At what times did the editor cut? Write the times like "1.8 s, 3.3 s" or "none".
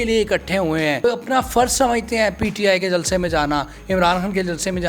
1.0 s

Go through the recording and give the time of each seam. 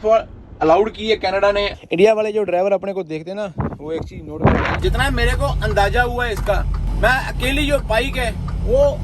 1.7 s, 4.8 s

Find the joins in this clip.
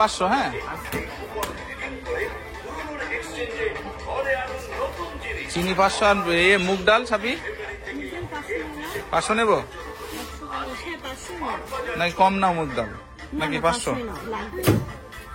none

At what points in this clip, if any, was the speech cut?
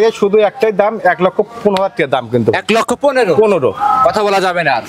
none

